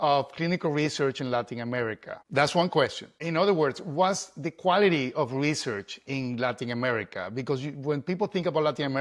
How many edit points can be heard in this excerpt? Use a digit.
2